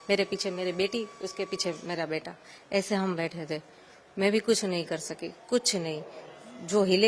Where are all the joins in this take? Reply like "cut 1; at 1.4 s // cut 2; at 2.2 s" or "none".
none